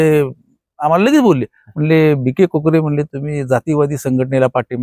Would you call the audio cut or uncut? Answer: uncut